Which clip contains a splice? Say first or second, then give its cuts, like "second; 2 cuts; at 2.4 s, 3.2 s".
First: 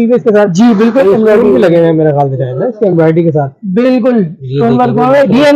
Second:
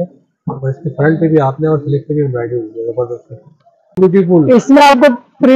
second; 1 cut; at 4.0 s